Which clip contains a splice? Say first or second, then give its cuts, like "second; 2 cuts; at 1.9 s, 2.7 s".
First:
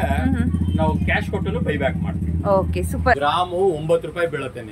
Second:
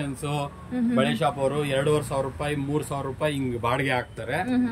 first; 1 cut; at 3.2 s